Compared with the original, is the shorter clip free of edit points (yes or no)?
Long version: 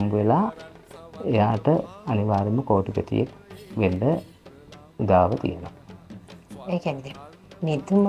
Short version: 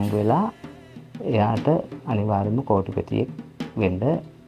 yes